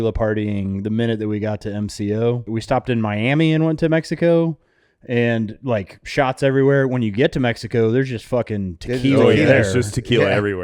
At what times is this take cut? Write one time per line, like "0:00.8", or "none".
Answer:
0:02.5